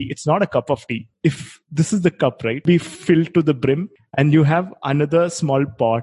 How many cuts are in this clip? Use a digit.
3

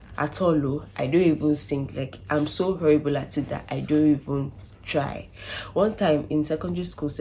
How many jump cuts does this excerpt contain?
1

